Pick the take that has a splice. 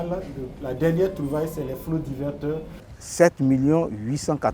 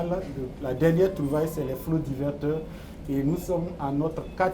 first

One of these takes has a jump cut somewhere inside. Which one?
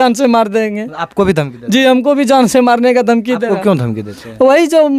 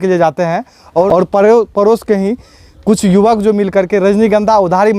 second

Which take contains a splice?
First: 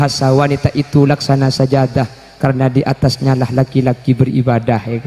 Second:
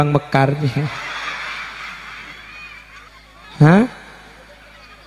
second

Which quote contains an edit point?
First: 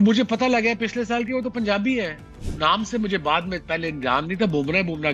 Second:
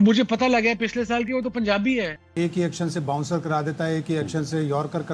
second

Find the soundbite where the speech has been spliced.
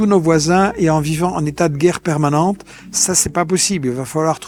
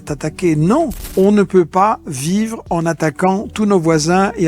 second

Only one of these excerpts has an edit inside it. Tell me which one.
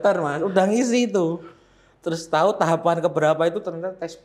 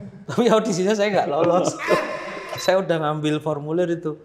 second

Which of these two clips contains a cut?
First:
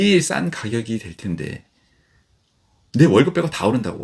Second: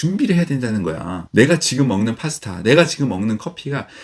second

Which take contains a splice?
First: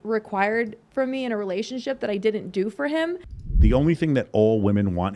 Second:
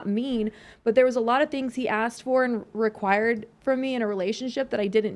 first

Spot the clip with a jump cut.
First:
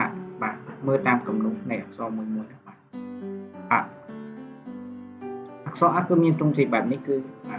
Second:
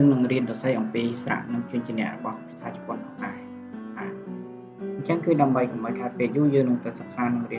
second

